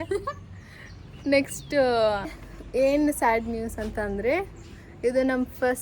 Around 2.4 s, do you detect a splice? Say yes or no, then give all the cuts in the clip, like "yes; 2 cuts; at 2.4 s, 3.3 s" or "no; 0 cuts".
yes; 1 cut; at 2.4 s